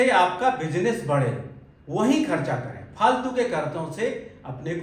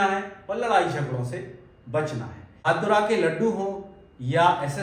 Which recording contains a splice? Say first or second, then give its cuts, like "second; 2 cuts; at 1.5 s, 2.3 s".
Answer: second; 1 cut; at 2.7 s